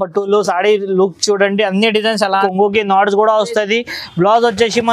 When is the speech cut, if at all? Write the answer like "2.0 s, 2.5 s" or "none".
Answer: 2.4 s